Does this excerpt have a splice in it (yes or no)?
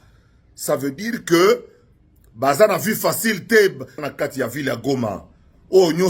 yes